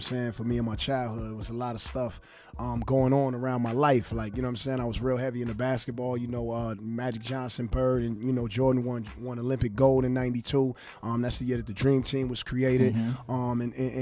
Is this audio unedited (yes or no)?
no